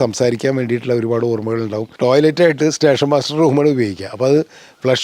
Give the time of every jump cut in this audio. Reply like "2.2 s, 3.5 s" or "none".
1.9 s